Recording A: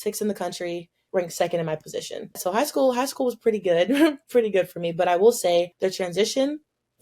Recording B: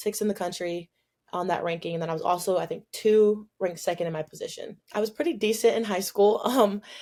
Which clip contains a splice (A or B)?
A